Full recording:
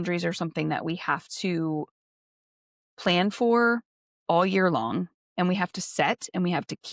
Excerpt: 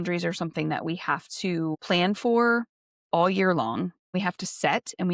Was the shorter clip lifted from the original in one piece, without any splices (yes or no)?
no